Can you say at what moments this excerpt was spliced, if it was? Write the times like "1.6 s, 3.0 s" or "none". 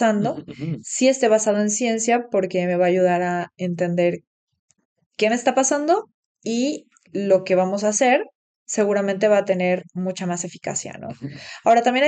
none